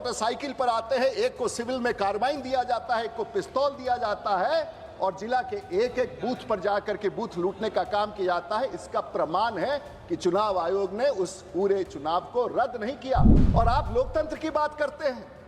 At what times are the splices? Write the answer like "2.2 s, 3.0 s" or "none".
13.4 s